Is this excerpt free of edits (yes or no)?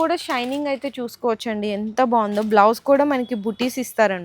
yes